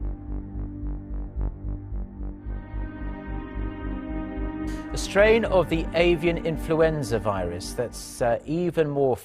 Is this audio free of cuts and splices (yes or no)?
yes